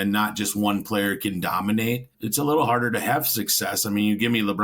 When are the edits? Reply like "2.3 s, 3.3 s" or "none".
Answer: 2.1 s